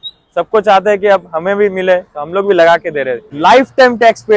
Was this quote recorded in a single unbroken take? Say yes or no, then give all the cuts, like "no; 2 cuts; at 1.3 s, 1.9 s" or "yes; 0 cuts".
no; 1 cut; at 3.3 s